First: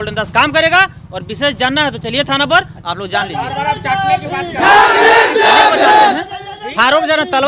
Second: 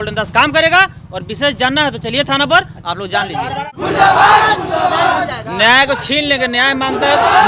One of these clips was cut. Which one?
second; 1 cut; at 3.6 s

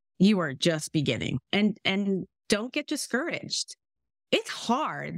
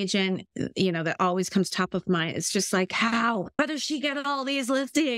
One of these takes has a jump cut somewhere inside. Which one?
second; 1 cut; at 3.6 s

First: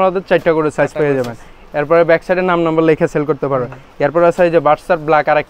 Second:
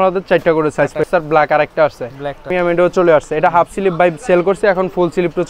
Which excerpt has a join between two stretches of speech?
second; 2 cuts; at 1.0 s, 2.5 s

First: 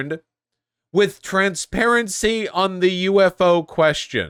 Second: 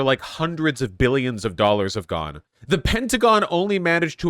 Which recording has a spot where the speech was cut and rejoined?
second; 1 cut; at 2.4 s

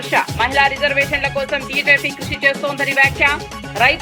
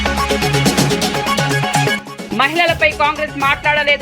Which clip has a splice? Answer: second; 1 cut; at 1.9 s

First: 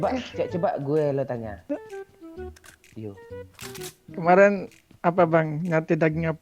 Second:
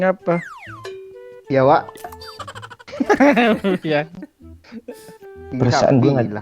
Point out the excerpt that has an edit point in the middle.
second; 1 cut; at 5.3 s

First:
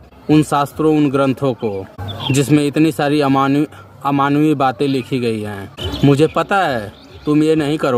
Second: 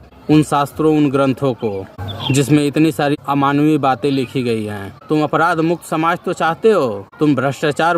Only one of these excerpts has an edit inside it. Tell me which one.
second; 2 cuts; at 3.1 s, 4.9 s

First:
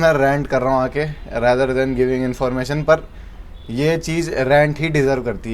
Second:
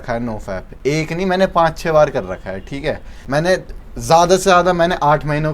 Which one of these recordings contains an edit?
second; 1 cut; at 3.1 s

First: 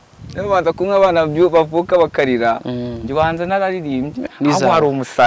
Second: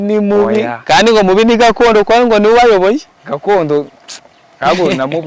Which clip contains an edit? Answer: first; 1 cut; at 4.2 s

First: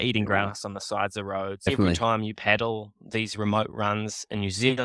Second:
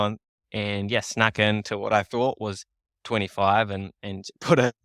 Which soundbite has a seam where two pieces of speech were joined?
first; 1 cut; at 1.7 s

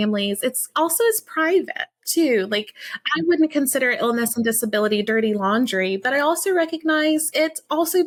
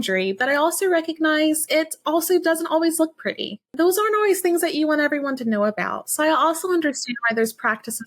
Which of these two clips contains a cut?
second; 1 cut; at 3.6 s

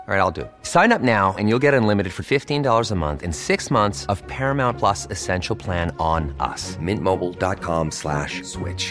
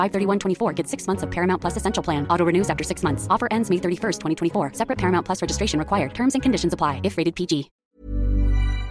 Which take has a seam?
second; 1 cut; at 7.8 s

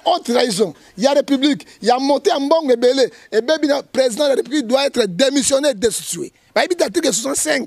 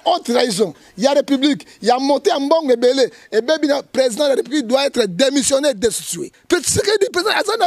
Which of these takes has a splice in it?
second; 1 cut; at 6.3 s

